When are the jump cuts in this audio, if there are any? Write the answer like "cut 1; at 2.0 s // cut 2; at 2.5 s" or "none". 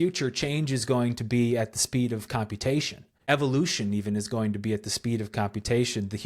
cut 1; at 3.2 s

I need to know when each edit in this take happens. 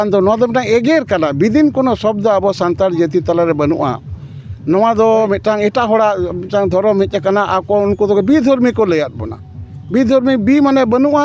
none

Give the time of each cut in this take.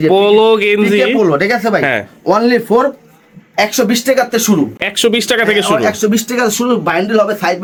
none

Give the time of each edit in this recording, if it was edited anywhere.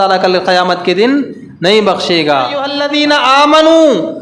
cut 1; at 2.8 s

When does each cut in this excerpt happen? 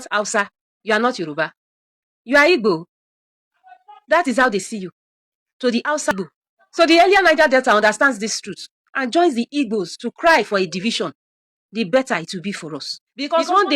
cut 1; at 6.1 s

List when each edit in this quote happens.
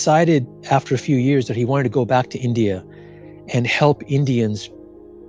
none

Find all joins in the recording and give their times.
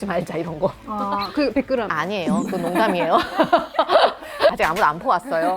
cut 1; at 4.5 s

